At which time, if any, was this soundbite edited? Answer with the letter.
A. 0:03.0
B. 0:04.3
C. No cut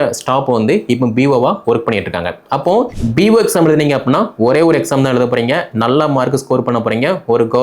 A